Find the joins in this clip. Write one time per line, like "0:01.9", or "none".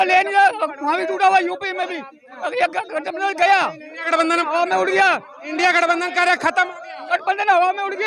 0:06.9